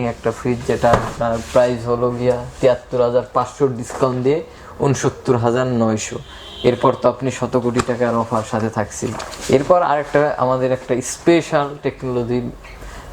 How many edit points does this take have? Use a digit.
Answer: 0